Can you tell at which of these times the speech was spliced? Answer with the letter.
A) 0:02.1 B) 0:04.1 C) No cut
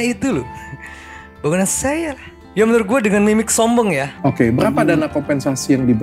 B